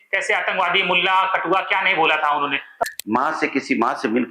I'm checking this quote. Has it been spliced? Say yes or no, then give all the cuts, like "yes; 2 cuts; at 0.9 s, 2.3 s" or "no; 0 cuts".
yes; 1 cut; at 2.8 s